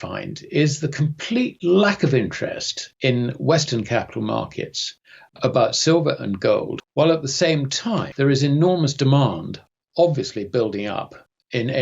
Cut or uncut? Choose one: cut